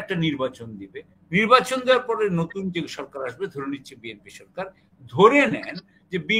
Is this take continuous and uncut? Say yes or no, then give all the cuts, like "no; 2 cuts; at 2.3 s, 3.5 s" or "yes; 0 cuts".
yes; 0 cuts